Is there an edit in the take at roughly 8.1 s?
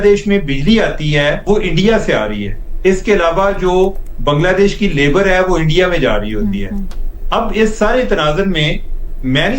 no; 1 cut; at 1.4 s

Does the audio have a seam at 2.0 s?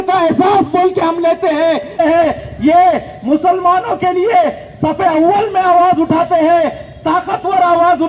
yes; 1 cut; at 2.0 s

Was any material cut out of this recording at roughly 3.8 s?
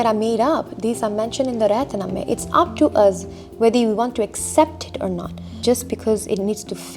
no; 1 cut; at 5.6 s

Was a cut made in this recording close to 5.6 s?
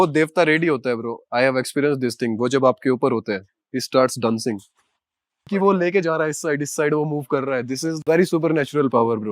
yes; 2 cuts; at 5.6 s, 7.9 s

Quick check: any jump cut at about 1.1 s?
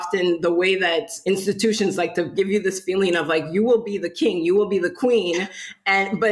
yes; 2 cuts; at 1.1 s, 2.3 s

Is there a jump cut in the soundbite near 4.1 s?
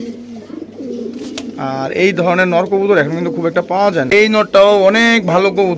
yes; 1 cut; at 4.1 s

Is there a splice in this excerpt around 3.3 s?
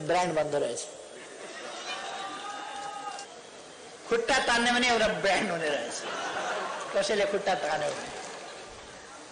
yes; 1 cut; at 3.3 s

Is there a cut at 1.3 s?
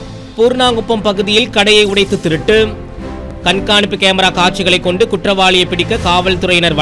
no; 0 cuts

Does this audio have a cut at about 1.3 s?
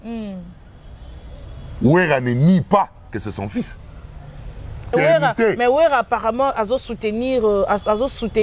no; 1 cut; at 4.9 s

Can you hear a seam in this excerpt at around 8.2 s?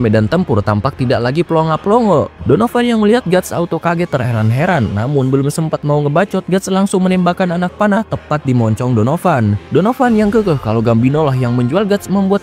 no; 2 cuts; at 2.3 s, 9.6 s

